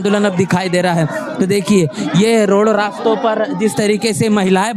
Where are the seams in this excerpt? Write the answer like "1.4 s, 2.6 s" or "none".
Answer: none